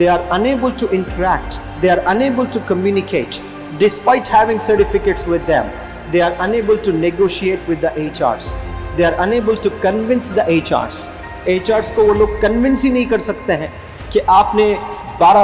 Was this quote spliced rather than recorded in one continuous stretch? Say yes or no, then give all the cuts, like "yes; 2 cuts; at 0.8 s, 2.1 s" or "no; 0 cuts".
no; 0 cuts